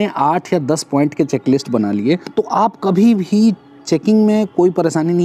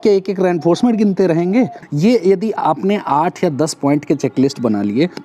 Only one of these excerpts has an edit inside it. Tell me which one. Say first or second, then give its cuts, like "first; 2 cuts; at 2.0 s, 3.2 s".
second; 1 cut; at 1.9 s